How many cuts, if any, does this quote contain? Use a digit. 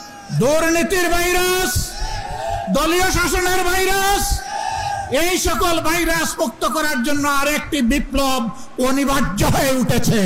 0